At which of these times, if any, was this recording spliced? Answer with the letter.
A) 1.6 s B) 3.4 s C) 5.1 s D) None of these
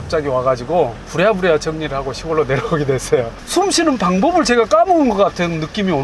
B